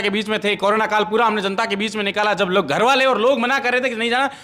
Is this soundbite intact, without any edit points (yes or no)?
yes